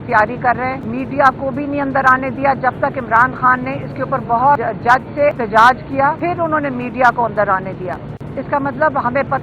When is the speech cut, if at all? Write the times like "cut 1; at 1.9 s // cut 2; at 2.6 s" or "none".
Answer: cut 1; at 0.8 s // cut 2; at 5.1 s // cut 3; at 6.2 s